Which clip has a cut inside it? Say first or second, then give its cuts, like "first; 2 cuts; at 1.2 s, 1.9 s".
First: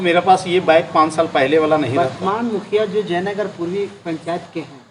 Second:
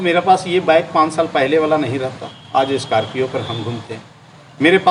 first; 1 cut; at 1.9 s